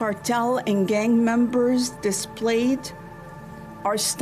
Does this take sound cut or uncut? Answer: uncut